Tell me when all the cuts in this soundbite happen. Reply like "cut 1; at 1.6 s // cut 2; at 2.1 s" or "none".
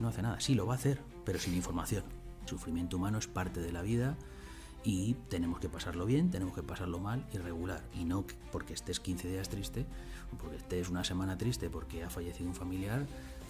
cut 1; at 2.5 s